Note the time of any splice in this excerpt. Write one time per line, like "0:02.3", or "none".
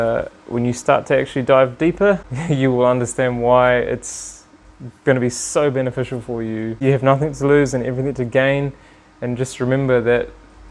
0:02.3
0:06.7